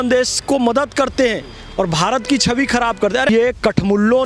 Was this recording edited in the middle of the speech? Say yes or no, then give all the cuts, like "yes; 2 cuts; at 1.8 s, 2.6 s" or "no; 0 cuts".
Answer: yes; 1 cut; at 3.3 s